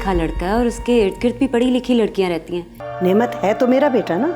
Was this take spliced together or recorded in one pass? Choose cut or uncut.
cut